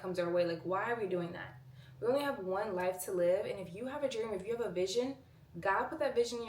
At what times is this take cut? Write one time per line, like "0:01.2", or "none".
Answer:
none